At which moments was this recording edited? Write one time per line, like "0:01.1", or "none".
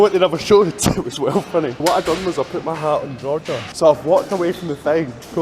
0:01.8
0:03.7